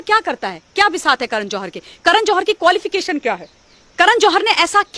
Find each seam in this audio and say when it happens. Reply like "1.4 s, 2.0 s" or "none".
none